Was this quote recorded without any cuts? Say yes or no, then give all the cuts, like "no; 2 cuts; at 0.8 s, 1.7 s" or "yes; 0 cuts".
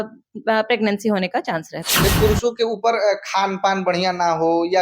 no; 1 cut; at 2.0 s